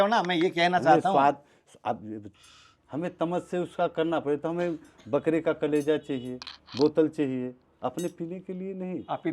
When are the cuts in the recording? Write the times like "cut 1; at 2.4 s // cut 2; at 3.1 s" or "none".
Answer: cut 1; at 2.2 s